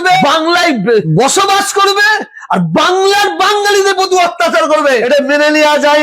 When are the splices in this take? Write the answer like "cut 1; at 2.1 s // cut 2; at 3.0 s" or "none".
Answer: none